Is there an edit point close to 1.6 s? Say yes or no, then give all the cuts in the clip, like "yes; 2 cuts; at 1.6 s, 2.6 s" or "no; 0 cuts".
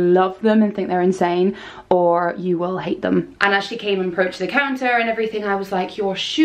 no; 1 cut; at 3.3 s